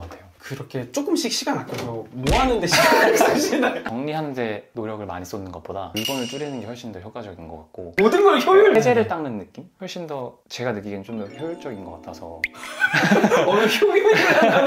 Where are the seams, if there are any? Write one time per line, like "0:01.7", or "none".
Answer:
0:03.8
0:08.7